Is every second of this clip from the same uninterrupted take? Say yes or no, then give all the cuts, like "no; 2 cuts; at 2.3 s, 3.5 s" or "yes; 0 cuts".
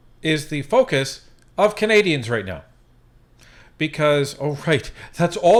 yes; 0 cuts